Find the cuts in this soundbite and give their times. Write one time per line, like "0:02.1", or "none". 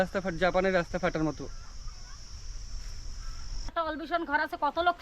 0:03.7